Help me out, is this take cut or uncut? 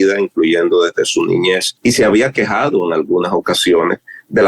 cut